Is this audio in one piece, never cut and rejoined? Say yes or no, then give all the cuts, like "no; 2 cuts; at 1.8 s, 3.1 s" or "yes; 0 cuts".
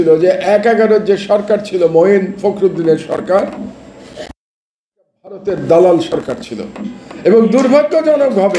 yes; 0 cuts